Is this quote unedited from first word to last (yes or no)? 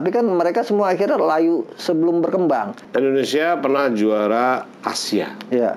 no